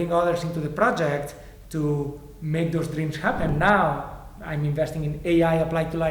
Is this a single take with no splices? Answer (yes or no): no